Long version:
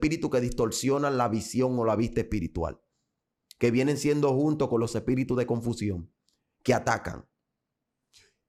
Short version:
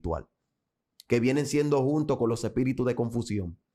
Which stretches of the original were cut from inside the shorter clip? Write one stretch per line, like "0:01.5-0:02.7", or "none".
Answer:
none